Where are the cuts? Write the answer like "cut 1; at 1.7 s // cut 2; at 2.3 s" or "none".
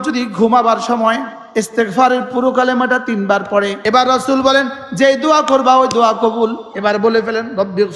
cut 1; at 1.4 s // cut 2; at 3.8 s // cut 3; at 6.7 s